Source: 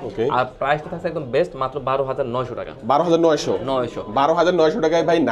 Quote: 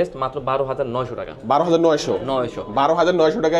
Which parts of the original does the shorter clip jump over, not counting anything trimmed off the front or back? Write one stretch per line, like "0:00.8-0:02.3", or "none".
none